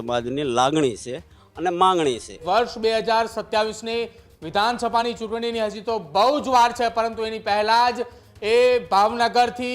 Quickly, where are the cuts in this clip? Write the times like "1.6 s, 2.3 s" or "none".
2.4 s

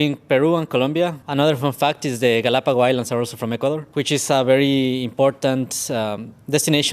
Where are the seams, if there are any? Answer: 1.2 s, 3.9 s

